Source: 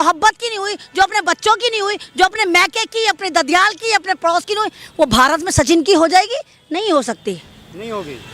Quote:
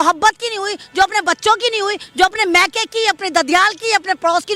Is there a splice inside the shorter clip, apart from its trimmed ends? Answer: no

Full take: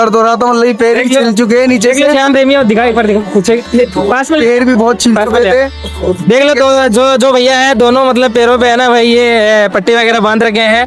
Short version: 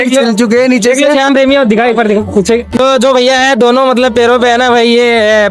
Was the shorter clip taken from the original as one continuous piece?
no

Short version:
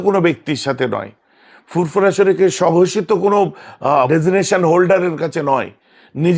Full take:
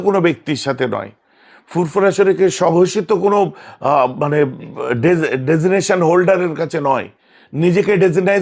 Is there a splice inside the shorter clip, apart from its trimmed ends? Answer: yes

